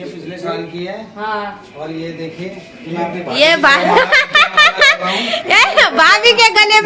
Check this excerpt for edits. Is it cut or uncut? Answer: uncut